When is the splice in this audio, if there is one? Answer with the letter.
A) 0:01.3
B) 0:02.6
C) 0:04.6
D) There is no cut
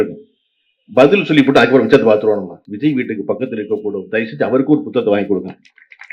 B